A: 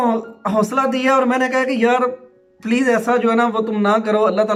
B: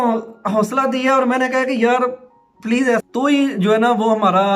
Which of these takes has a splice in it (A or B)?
B